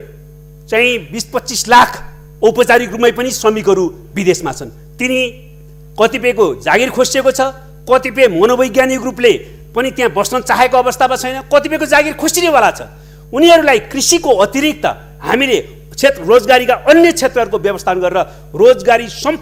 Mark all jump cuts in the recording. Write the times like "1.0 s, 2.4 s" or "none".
none